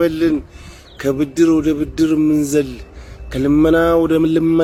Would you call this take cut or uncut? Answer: uncut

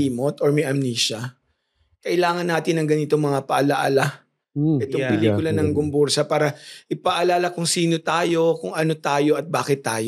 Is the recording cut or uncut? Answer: uncut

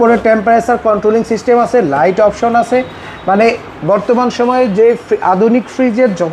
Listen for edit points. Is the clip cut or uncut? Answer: uncut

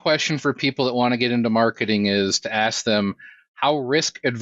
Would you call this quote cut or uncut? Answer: uncut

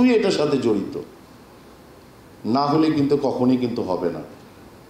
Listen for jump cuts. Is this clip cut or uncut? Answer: uncut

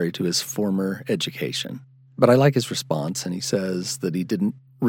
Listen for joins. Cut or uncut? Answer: uncut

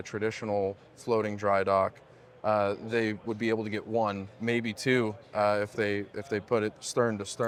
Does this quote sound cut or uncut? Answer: uncut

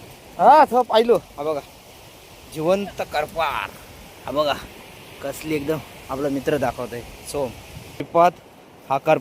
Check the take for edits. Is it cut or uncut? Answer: cut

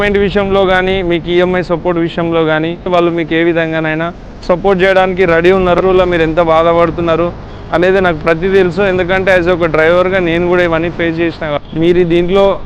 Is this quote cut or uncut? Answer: cut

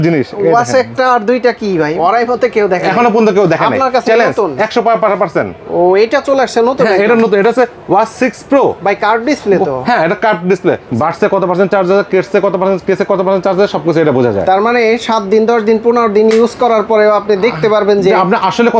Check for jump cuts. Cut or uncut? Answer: cut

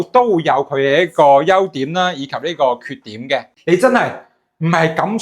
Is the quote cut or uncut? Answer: cut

